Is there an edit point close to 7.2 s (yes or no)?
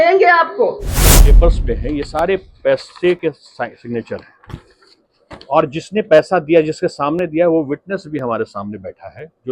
no